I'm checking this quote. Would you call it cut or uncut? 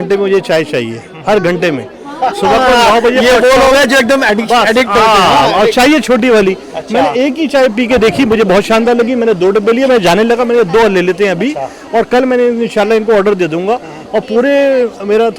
uncut